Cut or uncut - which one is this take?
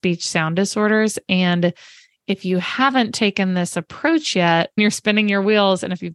cut